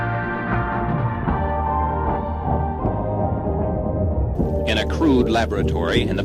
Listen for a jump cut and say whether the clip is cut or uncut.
uncut